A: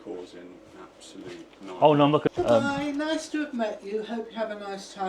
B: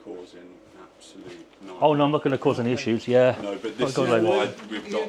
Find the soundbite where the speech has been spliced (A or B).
A